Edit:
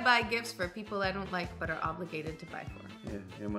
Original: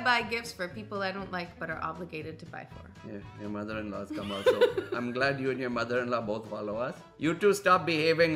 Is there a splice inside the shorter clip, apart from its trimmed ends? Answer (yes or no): no